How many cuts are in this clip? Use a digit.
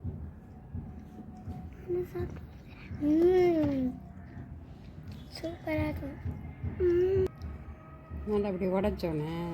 1